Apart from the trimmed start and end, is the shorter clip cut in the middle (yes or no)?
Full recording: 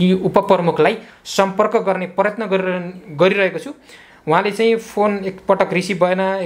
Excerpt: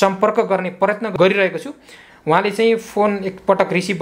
yes